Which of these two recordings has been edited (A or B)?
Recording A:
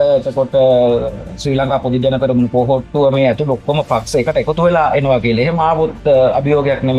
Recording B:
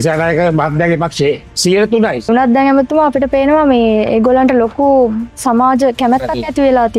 B